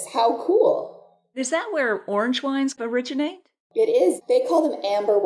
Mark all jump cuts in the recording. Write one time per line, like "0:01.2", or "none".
0:01.4
0:02.8
0:04.2